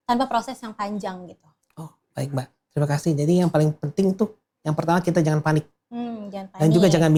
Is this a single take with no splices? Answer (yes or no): yes